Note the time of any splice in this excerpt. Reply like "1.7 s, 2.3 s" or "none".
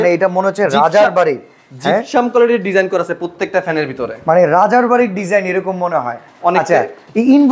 none